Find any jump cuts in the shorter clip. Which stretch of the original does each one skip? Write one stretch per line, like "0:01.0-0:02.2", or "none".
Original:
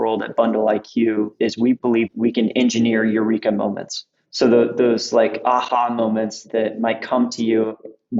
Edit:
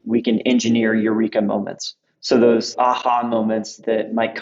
0:04.7-0:05.3